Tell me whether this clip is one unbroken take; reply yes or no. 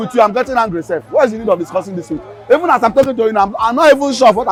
yes